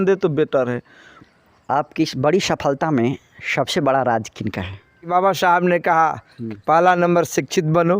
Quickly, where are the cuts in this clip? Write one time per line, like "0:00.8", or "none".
0:01.2
0:05.1